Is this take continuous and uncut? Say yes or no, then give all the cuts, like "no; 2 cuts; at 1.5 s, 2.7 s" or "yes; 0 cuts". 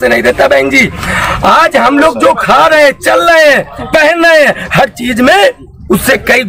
yes; 0 cuts